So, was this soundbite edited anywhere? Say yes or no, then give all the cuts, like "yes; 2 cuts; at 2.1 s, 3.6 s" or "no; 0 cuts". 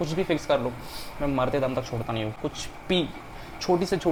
no; 0 cuts